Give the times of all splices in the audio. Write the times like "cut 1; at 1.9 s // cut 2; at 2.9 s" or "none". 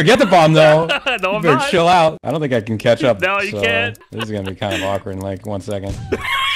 cut 1; at 2.2 s // cut 2; at 4.1 s